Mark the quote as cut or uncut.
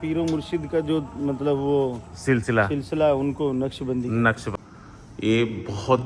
cut